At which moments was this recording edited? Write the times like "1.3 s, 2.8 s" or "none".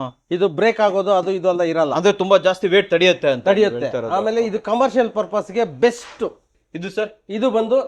6.6 s